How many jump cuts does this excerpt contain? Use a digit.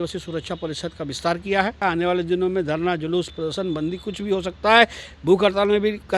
1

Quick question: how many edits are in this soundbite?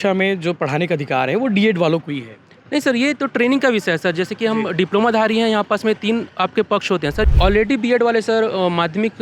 1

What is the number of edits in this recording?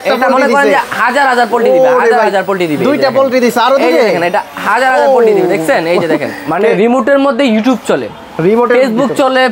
1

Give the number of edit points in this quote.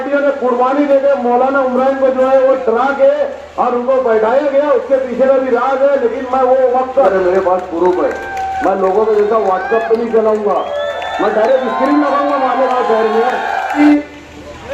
2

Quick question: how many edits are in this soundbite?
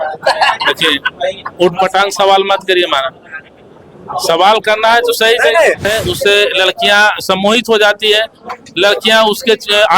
1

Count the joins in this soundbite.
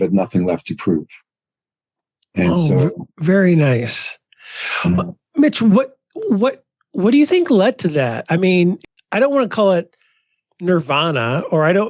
1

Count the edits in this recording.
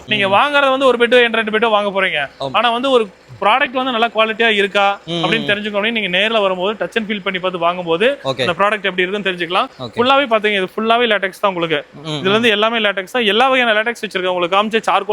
0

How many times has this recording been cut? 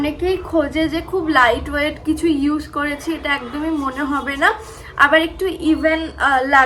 0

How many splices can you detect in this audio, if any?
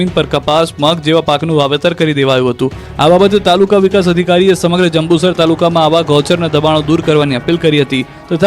1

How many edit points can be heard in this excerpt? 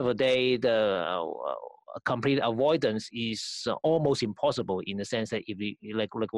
1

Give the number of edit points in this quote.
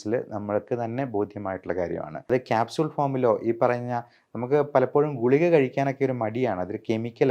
1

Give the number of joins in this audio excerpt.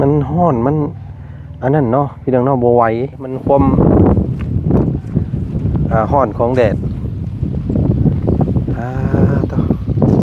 1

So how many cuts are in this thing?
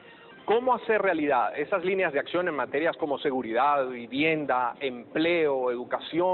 1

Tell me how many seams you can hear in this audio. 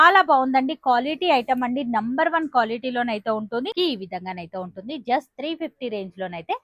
1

